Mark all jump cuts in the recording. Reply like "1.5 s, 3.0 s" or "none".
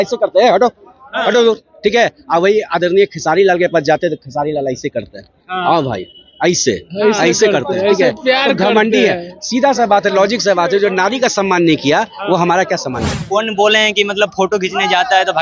13.1 s